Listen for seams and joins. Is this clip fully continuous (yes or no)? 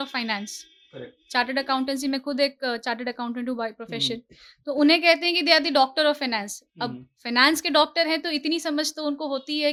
yes